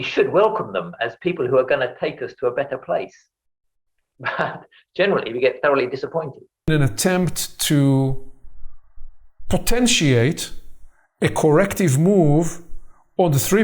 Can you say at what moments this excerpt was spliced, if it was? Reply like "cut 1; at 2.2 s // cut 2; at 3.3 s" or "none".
cut 1; at 6.7 s